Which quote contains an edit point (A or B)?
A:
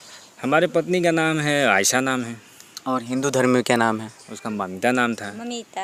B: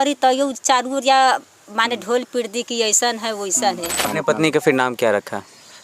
B